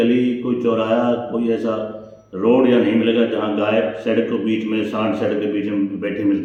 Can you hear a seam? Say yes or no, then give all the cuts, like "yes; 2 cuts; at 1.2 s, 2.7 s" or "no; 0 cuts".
no; 0 cuts